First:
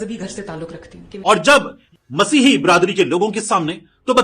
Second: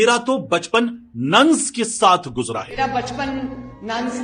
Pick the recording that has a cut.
first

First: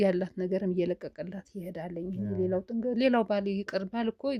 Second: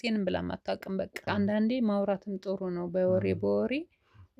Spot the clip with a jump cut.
second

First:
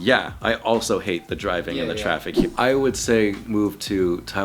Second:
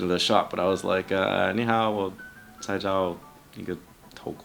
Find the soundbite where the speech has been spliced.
first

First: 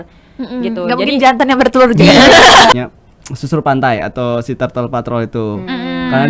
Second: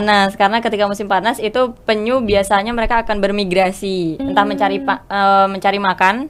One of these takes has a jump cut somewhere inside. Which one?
first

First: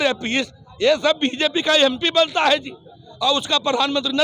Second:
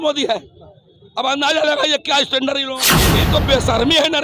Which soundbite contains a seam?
second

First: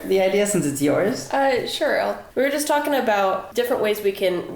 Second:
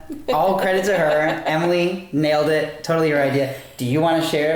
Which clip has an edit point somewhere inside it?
first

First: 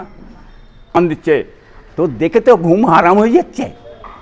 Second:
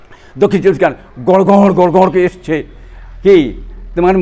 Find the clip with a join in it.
first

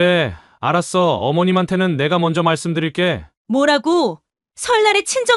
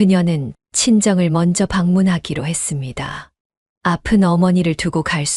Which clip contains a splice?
first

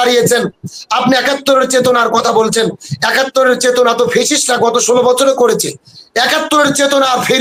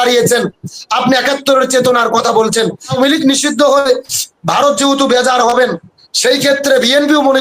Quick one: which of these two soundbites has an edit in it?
second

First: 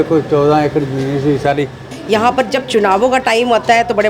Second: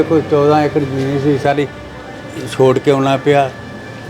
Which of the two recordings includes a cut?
first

